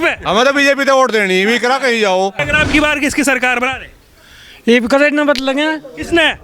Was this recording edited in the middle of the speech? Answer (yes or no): yes